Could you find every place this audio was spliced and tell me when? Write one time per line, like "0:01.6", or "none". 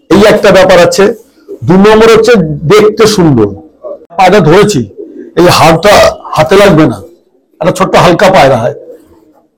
0:04.2

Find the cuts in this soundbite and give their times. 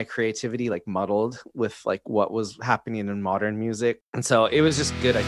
0:04.1

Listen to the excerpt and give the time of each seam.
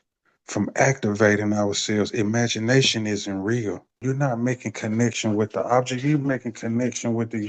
0:04.0

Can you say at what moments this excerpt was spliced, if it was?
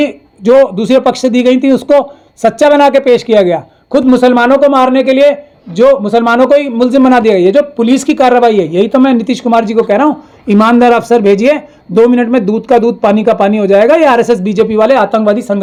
none

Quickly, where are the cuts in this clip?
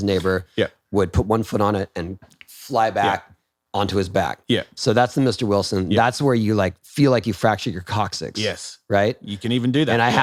none

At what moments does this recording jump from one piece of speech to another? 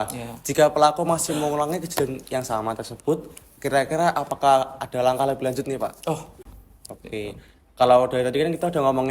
0:06.3

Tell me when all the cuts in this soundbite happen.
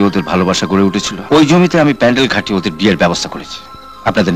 0:01.1

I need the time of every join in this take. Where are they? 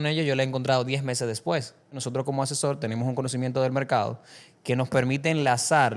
0:02.0

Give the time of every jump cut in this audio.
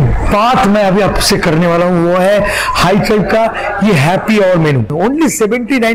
0:04.9

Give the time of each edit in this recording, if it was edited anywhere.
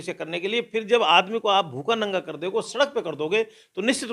none

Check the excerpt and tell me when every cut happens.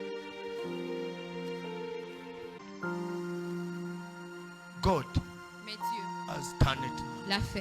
none

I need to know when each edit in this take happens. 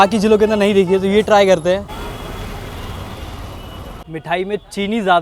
none

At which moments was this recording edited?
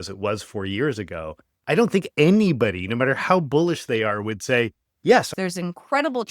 0:05.3

